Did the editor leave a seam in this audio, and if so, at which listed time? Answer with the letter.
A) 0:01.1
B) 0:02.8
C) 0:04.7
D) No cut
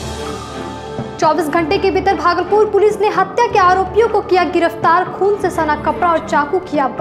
A